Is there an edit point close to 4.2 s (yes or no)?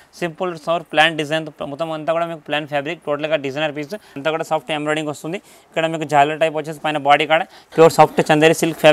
yes